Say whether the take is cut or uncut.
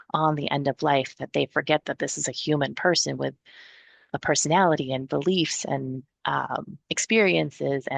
uncut